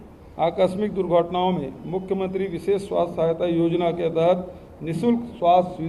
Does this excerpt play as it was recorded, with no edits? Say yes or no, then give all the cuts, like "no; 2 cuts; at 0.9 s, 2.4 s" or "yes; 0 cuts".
yes; 0 cuts